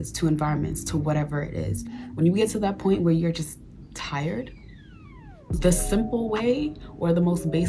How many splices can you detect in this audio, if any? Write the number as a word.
two